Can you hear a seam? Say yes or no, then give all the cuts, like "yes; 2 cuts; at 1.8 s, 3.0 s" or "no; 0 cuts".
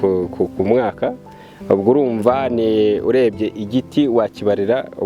no; 0 cuts